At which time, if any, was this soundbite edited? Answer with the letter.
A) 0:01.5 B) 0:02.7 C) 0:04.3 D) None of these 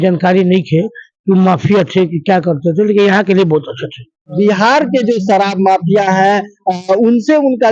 C